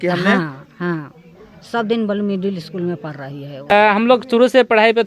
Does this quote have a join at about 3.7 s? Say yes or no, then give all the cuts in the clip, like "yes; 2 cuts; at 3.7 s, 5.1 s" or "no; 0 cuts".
yes; 1 cut; at 3.7 s